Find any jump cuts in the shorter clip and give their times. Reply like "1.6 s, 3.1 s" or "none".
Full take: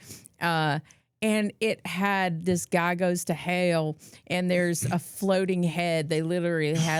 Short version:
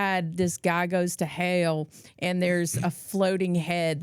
none